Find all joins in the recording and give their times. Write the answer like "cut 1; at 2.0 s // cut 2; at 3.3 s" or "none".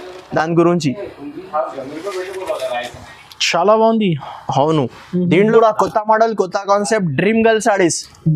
cut 1; at 5.5 s